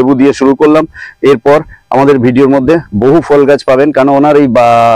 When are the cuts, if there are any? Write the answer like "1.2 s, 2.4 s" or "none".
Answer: none